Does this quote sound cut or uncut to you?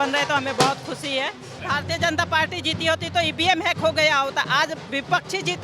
cut